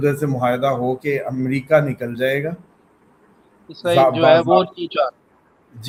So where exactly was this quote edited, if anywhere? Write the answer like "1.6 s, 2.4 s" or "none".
none